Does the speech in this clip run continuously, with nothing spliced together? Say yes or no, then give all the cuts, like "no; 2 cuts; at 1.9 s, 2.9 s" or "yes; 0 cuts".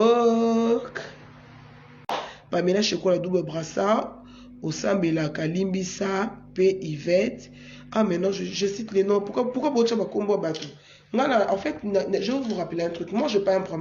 no; 1 cut; at 2.1 s